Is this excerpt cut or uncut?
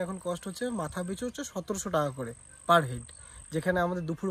uncut